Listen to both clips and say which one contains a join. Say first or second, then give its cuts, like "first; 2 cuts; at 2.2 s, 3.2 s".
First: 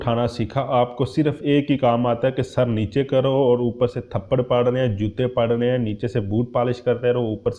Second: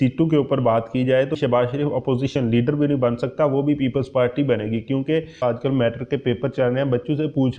second; 2 cuts; at 1.3 s, 5.4 s